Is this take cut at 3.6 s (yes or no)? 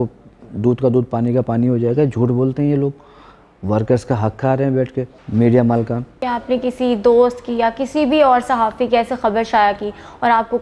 no